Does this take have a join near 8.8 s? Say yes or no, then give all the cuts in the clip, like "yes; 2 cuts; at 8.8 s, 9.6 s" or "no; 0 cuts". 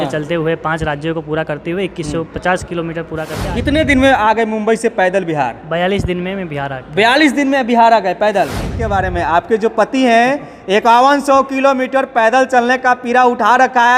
yes; 2 cuts; at 3.5 s, 8.8 s